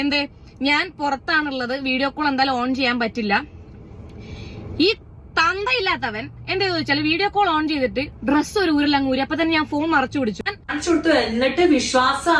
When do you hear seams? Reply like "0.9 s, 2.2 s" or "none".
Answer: 10.7 s